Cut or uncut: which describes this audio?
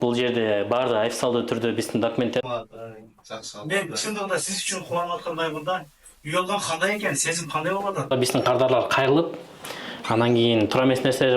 cut